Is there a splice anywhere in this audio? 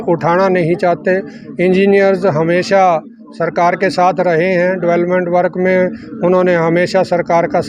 no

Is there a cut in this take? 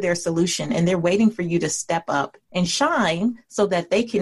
yes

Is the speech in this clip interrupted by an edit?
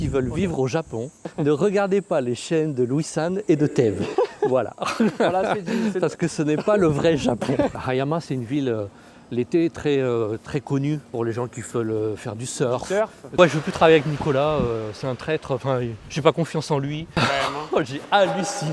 yes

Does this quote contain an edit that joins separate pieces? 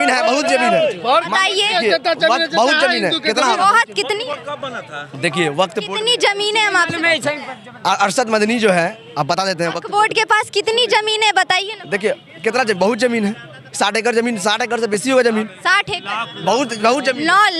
no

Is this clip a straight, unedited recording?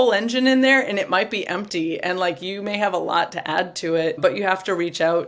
no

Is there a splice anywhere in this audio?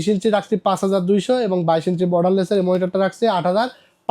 no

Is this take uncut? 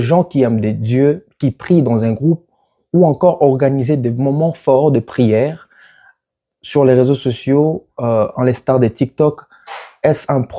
yes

